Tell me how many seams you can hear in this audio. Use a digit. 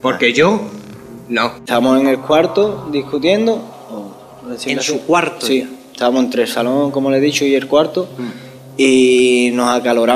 1